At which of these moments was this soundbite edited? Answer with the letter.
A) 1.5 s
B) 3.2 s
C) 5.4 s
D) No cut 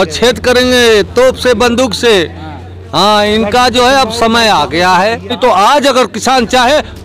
C